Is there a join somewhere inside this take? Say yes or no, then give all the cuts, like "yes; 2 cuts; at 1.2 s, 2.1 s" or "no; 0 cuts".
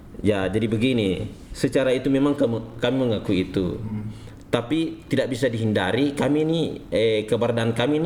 no; 0 cuts